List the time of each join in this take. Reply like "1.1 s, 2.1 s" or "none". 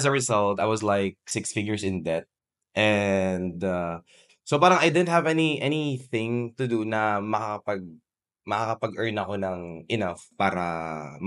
none